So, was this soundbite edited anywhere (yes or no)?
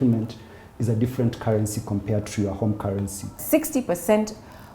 yes